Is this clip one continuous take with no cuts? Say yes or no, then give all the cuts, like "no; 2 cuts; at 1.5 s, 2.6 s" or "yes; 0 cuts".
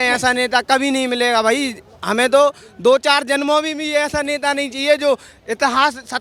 yes; 0 cuts